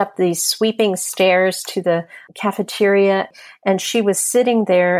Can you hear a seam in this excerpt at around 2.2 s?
yes; 2 cuts; at 2.2 s, 3.3 s

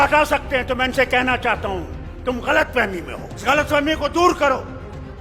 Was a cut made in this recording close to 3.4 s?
yes; 1 cut; at 3.4 s

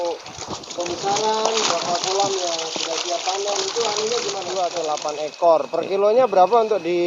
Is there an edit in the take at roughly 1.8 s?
no; 1 cut; at 4.5 s

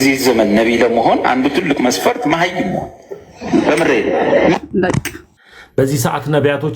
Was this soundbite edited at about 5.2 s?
yes; 1 cut; at 5.2 s

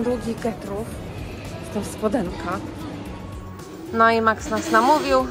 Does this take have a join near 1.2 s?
no; 1 cut; at 3.3 s

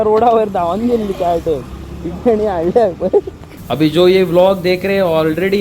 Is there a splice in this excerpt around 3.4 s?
yes; 1 cut; at 3.4 s

